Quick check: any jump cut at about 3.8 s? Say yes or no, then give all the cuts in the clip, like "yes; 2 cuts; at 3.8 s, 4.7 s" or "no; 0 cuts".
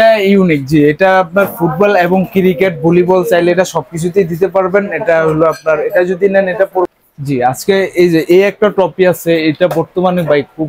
no; 1 cut; at 6.9 s